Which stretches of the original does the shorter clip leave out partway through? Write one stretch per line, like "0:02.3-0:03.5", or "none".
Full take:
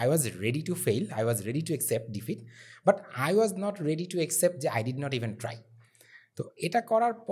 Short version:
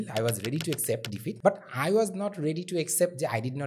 0:02.3-0:02.7